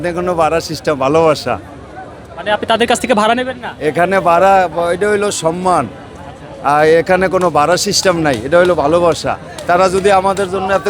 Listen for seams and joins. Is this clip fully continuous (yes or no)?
yes